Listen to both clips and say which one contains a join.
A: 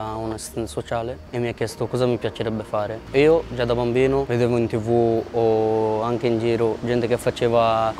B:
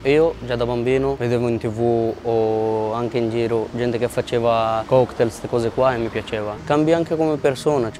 B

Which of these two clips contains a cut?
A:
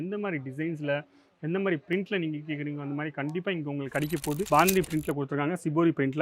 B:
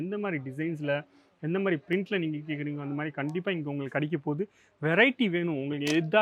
A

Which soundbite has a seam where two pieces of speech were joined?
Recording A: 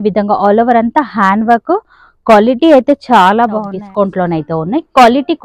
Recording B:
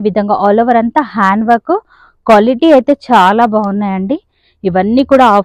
A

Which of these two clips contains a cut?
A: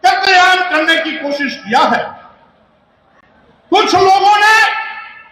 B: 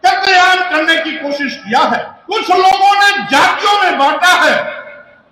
B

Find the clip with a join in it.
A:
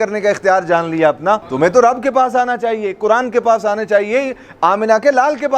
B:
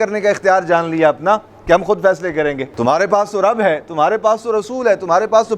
A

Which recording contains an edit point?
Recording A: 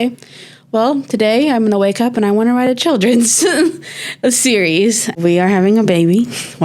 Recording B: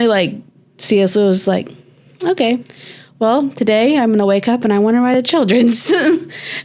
A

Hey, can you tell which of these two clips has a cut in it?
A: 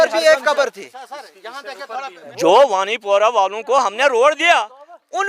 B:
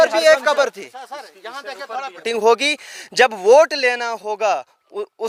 A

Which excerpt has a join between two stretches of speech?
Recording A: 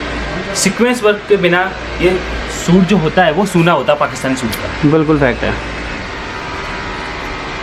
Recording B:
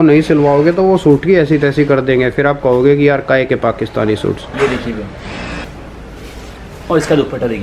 B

